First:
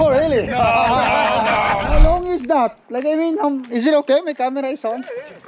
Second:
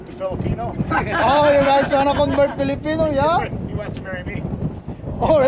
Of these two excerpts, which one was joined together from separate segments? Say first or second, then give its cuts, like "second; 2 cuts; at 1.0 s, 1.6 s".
first; 1 cut; at 2.0 s